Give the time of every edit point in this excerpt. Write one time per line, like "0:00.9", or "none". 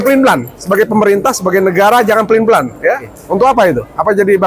0:03.2